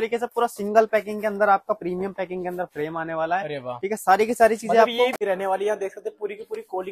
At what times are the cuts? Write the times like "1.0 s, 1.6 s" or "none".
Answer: 5.2 s